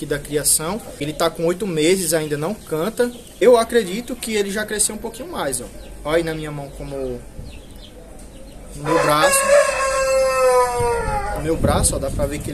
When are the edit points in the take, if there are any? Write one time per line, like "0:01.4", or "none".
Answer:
0:01.0
0:03.2

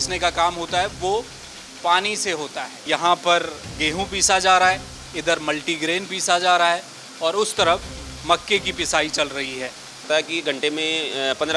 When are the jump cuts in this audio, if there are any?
0:02.8
0:10.0

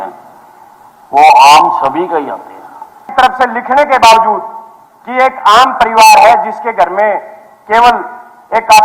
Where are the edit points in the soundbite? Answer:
0:03.0

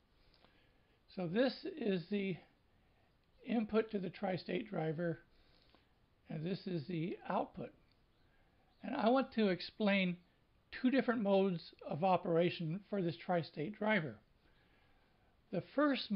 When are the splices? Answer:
0:08.6

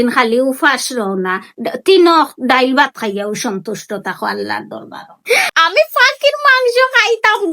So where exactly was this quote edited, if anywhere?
0:05.5

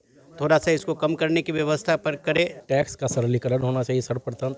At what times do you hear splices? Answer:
0:02.6

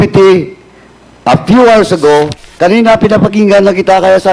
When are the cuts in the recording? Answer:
0:02.4

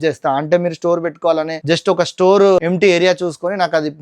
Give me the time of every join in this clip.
0:01.6
0:02.6

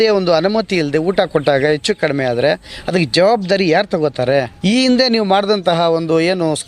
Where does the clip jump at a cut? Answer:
0:04.5

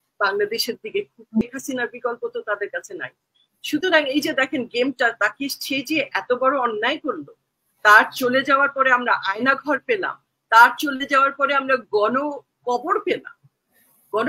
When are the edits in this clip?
0:01.4

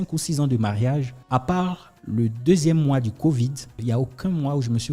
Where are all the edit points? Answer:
0:01.2
0:01.9
0:03.8

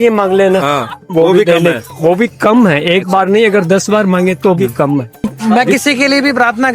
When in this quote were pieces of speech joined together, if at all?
0:05.3

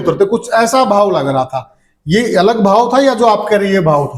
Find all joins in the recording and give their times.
none

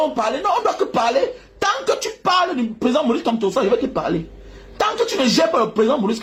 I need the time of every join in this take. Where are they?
none

